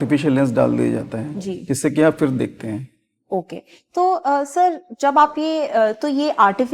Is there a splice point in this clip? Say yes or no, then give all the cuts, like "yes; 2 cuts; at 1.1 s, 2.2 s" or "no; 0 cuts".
no; 0 cuts